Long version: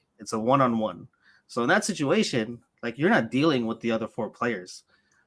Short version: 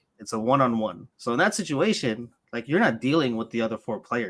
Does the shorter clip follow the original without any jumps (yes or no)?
no